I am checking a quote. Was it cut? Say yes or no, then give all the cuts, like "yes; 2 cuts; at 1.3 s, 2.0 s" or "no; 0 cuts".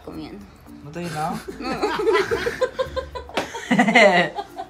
no; 0 cuts